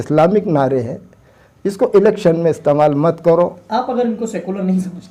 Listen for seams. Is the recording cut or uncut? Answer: uncut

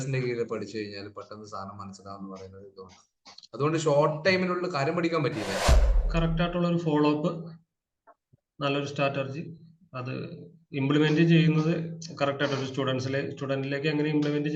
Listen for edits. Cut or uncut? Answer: cut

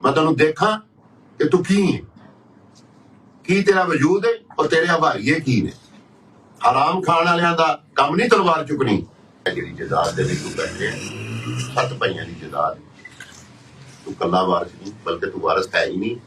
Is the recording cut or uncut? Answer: cut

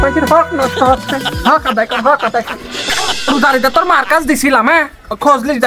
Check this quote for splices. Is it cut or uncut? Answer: cut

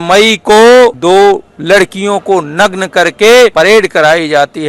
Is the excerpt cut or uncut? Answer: cut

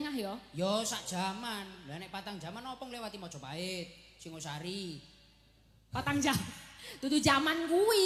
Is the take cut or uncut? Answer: uncut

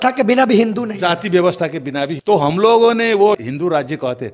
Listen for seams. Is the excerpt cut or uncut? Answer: cut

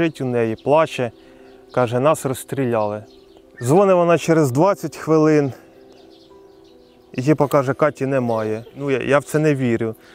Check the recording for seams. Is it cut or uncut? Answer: cut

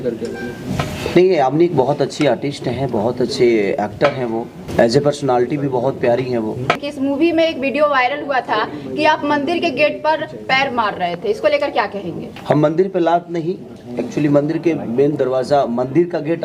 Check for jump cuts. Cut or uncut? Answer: cut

